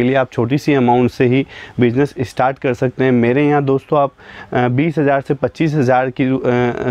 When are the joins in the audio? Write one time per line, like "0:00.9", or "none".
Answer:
none